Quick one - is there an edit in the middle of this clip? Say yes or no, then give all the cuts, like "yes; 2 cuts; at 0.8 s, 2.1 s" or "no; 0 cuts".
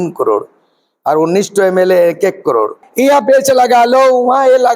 yes; 1 cut; at 2.8 s